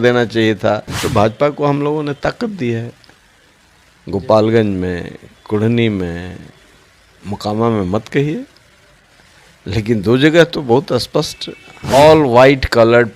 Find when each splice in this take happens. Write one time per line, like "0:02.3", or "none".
0:01.0
0:11.9